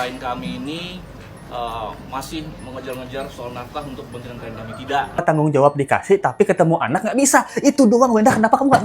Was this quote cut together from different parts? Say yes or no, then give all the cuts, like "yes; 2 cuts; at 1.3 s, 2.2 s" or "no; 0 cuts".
yes; 1 cut; at 5.2 s